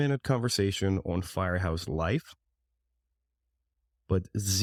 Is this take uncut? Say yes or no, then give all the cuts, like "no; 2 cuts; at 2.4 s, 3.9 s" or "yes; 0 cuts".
yes; 0 cuts